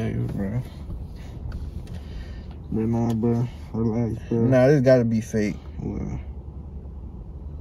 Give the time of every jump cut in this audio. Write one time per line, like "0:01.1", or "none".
none